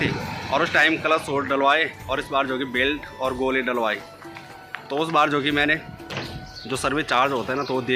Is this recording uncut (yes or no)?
yes